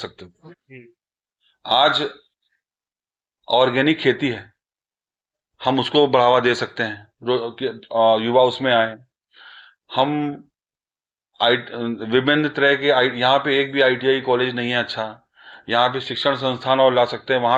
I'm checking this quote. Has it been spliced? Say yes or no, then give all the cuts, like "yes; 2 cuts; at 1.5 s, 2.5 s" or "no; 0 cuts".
no; 0 cuts